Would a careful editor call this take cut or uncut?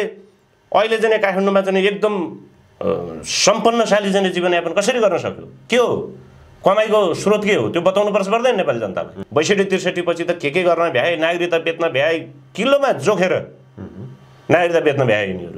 cut